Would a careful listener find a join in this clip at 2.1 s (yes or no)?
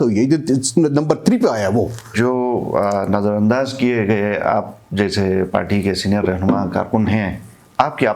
yes